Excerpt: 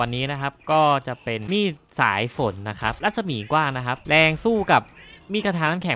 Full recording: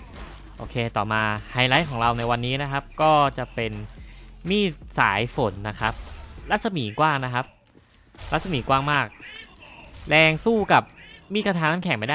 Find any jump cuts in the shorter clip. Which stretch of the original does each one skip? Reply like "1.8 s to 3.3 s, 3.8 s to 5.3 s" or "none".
3.7 s to 4.4 s, 6.0 s to 6.4 s, 7.5 s to 10.0 s